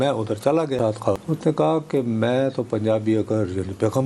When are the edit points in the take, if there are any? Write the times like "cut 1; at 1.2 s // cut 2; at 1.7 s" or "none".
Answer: cut 1; at 1.2 s